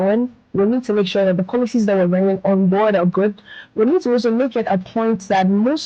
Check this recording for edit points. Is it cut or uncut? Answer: uncut